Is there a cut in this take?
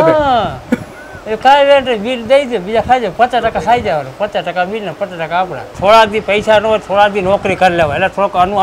yes; 1 cut; at 5.6 s

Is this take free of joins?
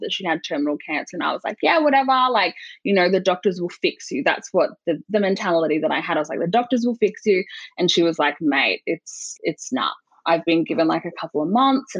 no; 1 cut; at 9.2 s

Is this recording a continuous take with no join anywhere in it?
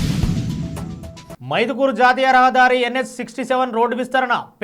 no; 1 cut; at 1.2 s

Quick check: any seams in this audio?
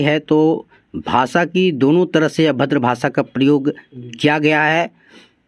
no; 0 cuts

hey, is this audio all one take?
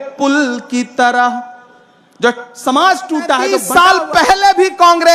no; 1 cut; at 3.6 s

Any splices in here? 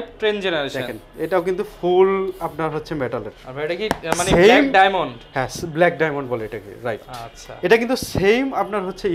no; 0 cuts

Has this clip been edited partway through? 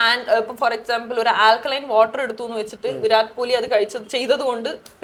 no; 0 cuts

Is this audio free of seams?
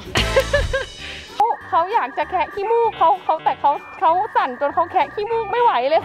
no; 1 cut; at 1.4 s

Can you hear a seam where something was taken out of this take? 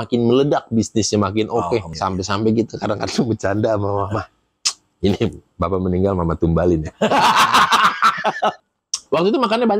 yes; 2 cuts; at 1.9 s, 8.6 s

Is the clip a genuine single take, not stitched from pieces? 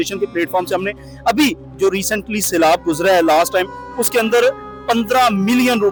yes; 0 cuts

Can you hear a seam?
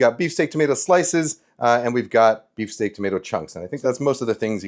yes; 1 cut; at 3.8 s

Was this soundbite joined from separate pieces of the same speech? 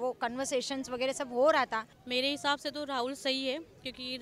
yes; 1 cut; at 2.0 s

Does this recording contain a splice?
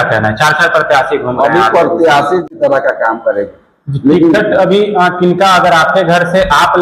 yes; 1 cut; at 2.5 s

